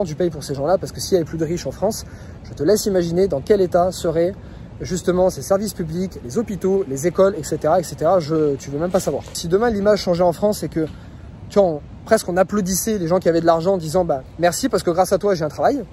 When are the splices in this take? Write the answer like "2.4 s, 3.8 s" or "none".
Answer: 9.4 s, 14.3 s